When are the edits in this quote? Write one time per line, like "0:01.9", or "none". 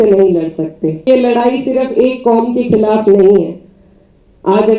0:01.1

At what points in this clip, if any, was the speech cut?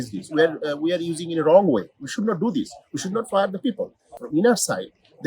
0:04.1

